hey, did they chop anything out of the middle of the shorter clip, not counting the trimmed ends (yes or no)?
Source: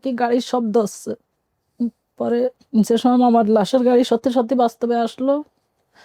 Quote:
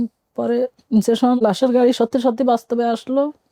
yes